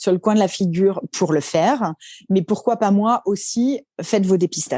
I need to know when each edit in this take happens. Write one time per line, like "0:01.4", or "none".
0:03.9